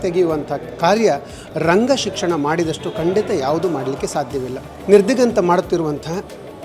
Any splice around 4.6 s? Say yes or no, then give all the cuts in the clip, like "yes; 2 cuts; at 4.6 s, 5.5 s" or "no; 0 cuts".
yes; 1 cut; at 4.6 s